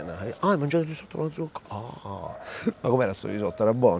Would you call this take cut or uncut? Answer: uncut